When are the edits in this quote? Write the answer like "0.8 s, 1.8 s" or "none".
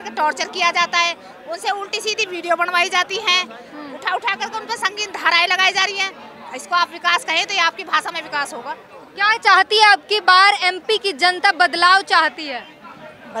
none